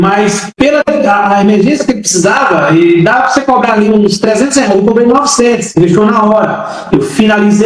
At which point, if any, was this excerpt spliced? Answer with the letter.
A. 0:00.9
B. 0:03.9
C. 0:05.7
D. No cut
D